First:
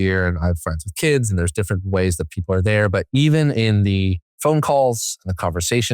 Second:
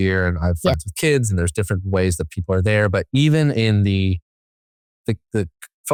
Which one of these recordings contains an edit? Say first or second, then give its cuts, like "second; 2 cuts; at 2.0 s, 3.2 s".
first; 1 cut; at 4.3 s